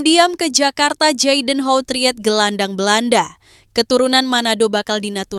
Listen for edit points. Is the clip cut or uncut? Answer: uncut